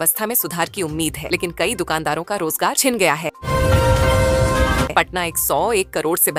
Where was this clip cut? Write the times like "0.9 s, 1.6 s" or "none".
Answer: none